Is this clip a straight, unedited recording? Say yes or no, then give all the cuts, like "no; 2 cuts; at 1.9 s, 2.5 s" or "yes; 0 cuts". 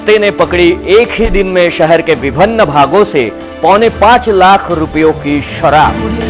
yes; 0 cuts